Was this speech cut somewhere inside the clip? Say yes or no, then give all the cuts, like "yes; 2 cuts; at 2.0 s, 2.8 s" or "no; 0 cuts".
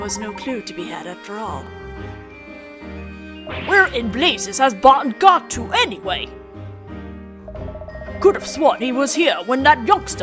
no; 0 cuts